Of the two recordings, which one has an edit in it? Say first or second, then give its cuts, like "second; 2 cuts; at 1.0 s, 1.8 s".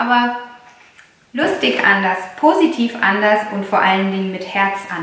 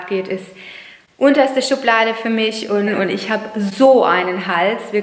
second; 1 cut; at 2.9 s